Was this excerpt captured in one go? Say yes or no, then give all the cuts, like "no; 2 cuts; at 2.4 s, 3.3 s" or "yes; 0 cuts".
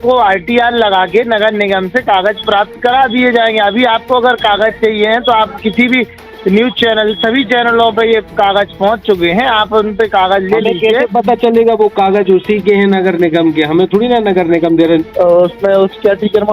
no; 1 cut; at 15.0 s